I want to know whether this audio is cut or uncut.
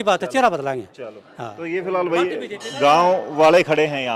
uncut